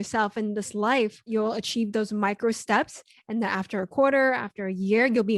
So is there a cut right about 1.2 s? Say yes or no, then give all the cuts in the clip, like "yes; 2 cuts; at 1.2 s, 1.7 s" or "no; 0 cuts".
yes; 1 cut; at 1.2 s